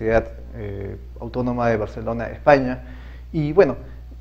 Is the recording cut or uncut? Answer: cut